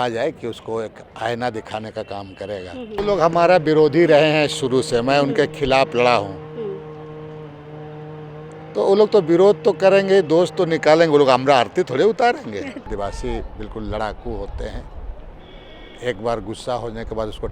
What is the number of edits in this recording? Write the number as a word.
two